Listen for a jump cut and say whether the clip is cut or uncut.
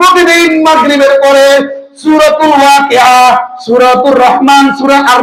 uncut